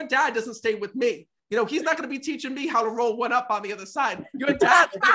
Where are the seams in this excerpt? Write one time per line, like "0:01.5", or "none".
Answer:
none